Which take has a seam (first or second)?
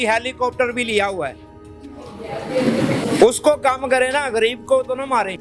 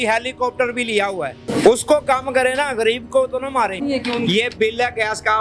second